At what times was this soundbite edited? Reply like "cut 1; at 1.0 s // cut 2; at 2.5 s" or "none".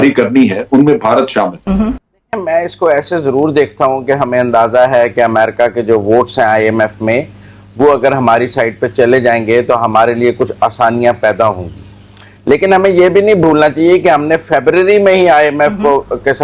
none

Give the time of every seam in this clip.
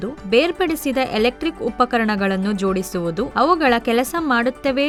none

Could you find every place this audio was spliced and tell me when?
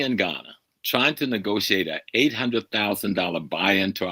cut 1; at 1.6 s

